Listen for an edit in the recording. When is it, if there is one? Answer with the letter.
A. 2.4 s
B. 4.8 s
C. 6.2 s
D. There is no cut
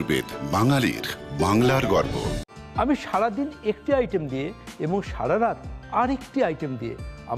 D